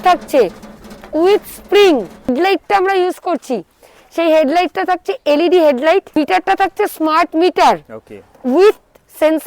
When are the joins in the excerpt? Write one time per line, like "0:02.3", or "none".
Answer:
0:02.3
0:06.2